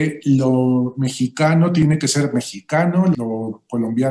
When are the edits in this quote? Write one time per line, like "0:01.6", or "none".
0:01.8
0:03.1